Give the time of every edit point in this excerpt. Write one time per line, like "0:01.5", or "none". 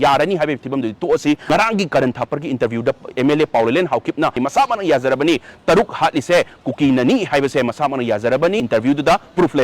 0:01.5
0:04.4
0:08.6